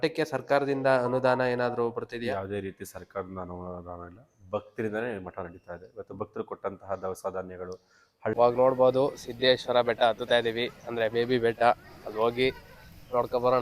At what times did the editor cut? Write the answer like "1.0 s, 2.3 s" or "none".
8.3 s